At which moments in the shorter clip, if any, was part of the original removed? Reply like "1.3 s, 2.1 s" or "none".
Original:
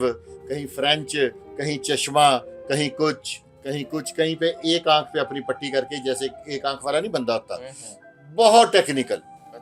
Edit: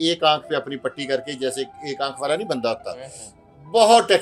none